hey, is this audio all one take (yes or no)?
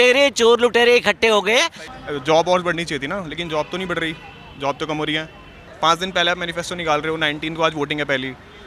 no